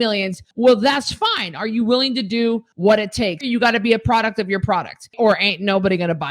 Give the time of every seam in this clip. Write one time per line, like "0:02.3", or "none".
0:03.4